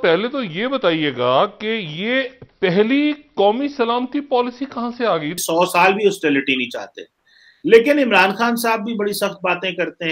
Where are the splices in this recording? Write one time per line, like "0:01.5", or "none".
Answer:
0:05.4

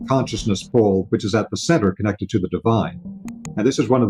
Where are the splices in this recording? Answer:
0:03.1

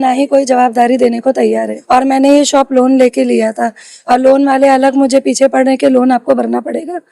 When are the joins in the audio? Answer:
0:01.7

